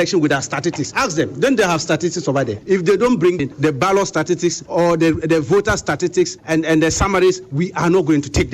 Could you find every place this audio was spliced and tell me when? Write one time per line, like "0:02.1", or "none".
0:00.9
0:02.6
0:03.4
0:04.6
0:06.4

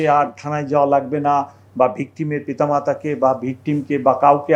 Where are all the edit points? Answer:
none

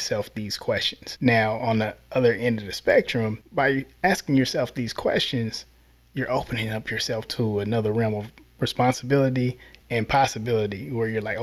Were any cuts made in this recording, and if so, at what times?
0:01.0
0:03.4

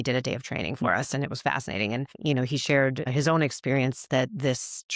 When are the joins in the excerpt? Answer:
0:02.1
0:03.1

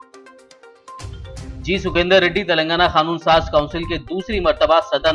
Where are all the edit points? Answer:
0:00.9

